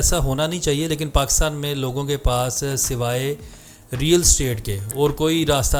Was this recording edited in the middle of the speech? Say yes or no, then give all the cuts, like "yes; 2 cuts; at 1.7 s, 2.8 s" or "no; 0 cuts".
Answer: no; 0 cuts